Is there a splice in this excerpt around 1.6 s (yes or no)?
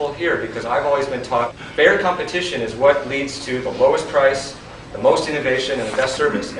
yes